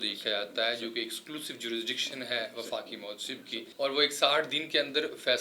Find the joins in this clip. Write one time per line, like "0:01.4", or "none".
0:03.7